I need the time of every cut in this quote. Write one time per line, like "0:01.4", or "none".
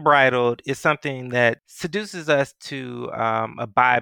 none